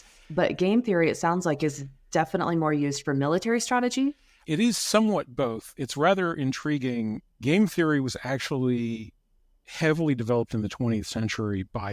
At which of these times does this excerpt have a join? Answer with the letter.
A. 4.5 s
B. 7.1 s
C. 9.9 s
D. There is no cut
A